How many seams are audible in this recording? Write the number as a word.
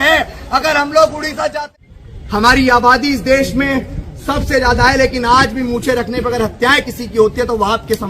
one